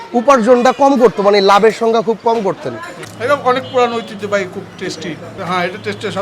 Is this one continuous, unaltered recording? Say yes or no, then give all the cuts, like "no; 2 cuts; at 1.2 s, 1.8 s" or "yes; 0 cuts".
no; 2 cuts; at 3.0 s, 5.3 s